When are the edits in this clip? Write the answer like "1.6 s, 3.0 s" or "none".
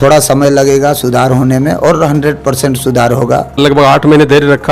3.6 s